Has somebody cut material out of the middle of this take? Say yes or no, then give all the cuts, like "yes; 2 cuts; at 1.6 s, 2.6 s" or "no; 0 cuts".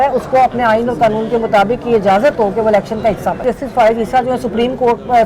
yes; 1 cut; at 3.4 s